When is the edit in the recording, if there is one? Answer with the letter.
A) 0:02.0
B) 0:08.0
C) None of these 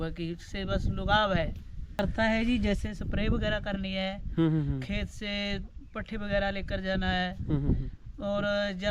A